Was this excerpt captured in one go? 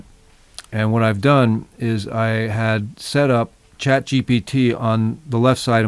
no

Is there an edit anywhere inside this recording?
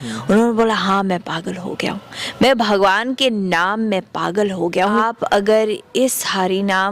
yes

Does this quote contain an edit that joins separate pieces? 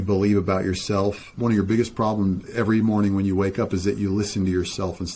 yes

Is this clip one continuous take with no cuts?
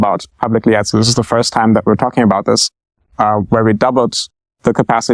yes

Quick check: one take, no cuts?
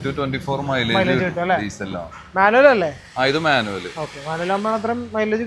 yes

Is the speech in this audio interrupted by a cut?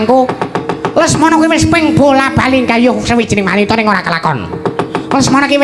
no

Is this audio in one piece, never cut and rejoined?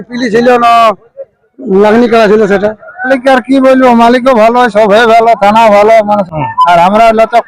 no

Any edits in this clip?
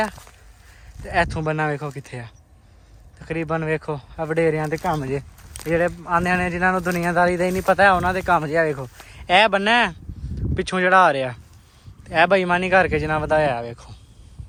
no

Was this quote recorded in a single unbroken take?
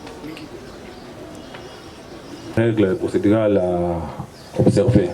no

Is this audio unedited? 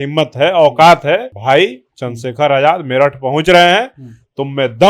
no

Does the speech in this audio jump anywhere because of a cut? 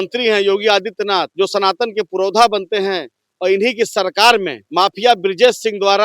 yes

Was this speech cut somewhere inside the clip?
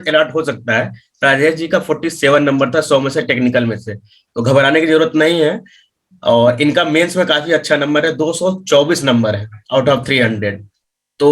no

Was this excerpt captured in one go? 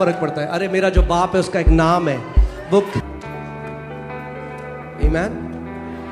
no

